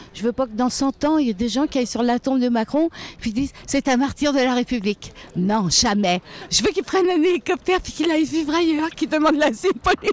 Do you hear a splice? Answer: no; 0 cuts

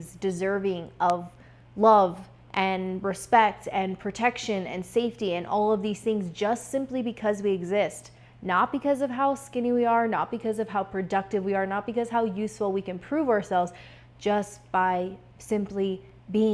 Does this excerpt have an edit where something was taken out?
no; 0 cuts

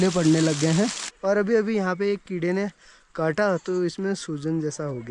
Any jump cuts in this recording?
yes; 1 cut; at 1.1 s

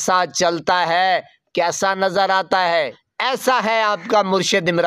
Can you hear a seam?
yes; 1 cut; at 3.0 s

